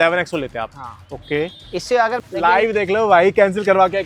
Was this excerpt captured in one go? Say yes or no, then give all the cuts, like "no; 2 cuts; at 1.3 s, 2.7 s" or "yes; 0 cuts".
no; 1 cut; at 2.2 s